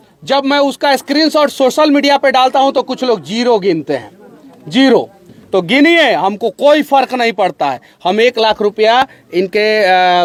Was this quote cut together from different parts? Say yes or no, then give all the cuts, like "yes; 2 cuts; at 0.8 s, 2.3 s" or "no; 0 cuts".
no; 0 cuts